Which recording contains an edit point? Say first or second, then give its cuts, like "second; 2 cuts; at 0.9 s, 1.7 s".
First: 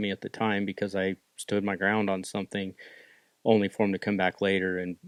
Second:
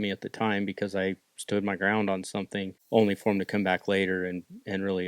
second; 1 cut; at 2.8 s